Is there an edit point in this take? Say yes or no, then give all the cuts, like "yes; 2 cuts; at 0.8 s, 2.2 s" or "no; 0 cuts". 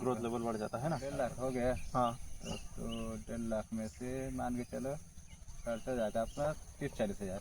yes; 1 cut; at 1.1 s